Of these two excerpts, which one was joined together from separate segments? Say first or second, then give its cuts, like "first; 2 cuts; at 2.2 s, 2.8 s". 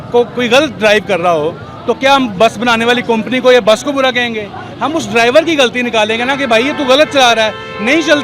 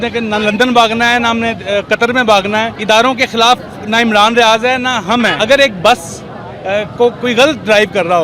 second; 2 cuts; at 2.7 s, 5.3 s